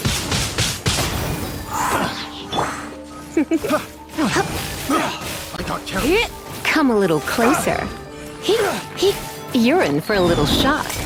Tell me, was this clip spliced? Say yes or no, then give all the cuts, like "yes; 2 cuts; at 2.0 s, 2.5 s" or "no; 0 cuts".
no; 0 cuts